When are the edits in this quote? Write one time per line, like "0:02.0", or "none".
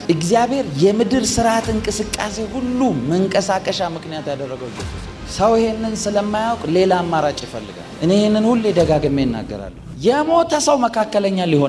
0:07.9